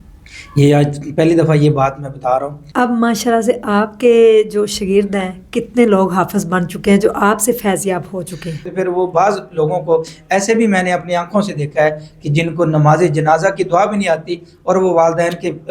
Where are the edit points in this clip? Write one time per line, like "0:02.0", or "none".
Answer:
0:02.6
0:08.7